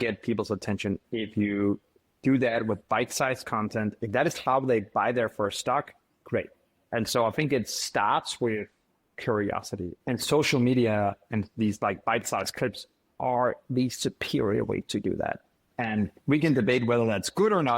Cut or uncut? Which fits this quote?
cut